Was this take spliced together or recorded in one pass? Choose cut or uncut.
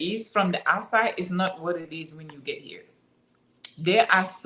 uncut